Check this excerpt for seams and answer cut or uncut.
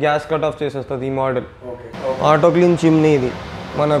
cut